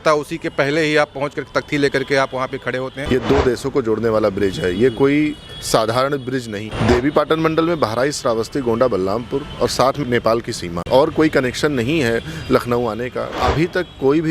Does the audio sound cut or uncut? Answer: cut